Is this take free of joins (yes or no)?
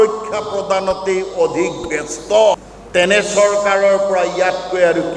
no